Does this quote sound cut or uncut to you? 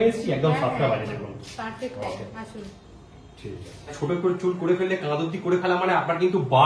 cut